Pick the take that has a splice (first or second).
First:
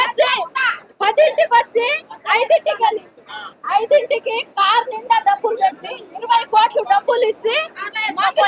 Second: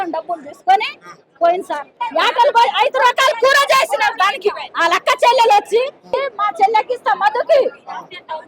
second